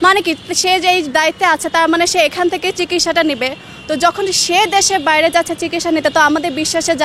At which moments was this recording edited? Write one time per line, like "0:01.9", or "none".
none

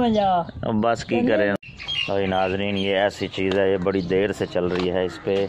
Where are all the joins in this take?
0:01.5

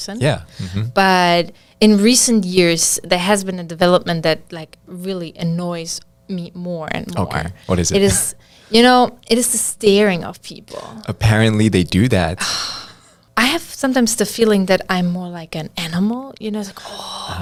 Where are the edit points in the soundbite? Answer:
none

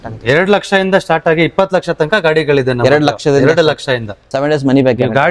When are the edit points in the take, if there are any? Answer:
0:04.1

